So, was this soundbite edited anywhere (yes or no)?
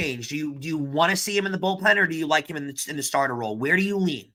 no